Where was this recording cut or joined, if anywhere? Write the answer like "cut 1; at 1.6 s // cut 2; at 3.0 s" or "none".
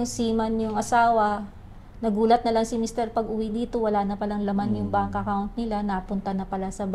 none